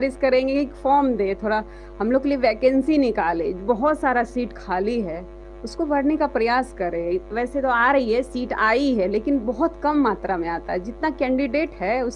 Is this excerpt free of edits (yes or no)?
yes